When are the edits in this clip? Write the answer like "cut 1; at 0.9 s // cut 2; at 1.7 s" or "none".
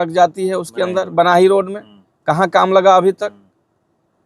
none